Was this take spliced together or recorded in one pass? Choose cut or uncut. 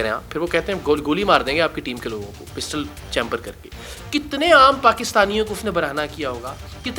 cut